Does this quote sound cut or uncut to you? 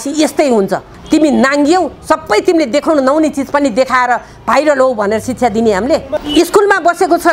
cut